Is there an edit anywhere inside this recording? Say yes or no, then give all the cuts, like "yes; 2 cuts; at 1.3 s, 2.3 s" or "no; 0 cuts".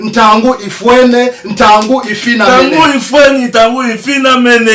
no; 0 cuts